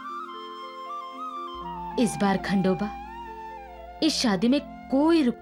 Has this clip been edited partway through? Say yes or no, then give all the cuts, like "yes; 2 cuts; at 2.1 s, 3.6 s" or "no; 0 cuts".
no; 0 cuts